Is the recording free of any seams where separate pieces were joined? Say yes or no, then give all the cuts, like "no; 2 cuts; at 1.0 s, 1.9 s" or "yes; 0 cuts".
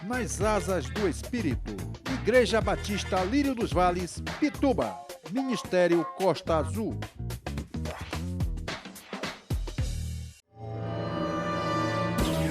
no; 1 cut; at 10.3 s